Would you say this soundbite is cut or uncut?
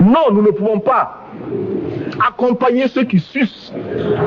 uncut